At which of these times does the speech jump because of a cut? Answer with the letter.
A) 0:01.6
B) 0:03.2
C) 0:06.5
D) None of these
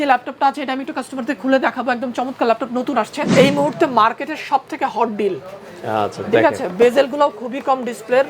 B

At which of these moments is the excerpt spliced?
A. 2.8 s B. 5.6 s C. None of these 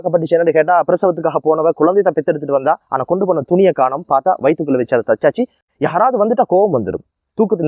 B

